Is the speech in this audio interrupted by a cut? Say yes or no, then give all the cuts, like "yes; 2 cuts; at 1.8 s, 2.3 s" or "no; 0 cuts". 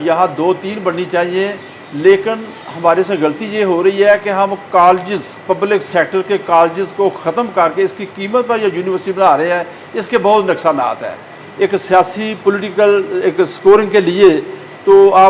yes; 1 cut; at 11.4 s